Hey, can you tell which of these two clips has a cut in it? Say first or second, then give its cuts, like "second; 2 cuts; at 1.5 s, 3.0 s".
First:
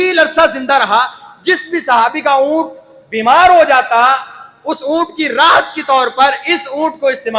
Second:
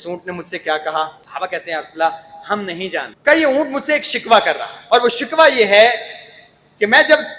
second; 3 cuts; at 1.2 s, 3.1 s, 4.7 s